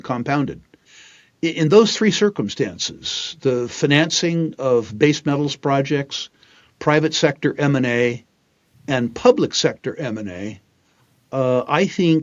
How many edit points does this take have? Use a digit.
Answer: 1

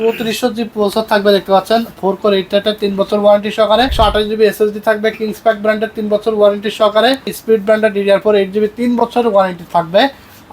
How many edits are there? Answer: 2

